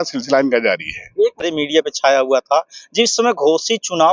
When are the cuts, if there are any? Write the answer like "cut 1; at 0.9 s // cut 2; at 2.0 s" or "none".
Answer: cut 1; at 1.4 s